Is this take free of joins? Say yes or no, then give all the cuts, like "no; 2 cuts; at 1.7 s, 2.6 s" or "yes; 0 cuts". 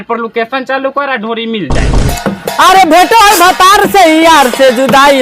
no; 1 cut; at 2.1 s